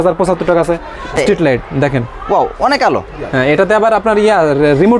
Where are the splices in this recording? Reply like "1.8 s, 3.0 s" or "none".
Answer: 1.2 s